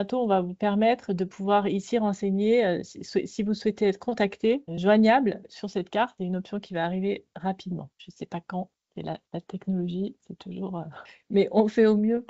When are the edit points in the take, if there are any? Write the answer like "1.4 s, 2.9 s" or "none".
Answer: 4.7 s, 6.1 s